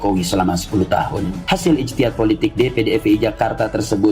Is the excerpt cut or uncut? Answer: cut